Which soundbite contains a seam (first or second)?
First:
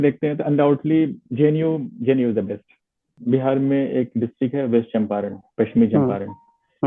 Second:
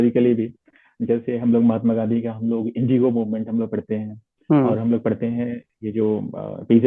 first